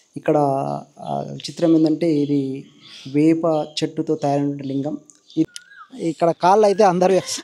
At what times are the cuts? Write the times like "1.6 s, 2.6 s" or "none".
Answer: 5.5 s